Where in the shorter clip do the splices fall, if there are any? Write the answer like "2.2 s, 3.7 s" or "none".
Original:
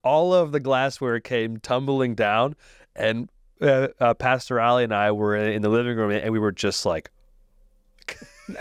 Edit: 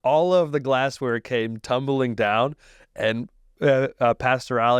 none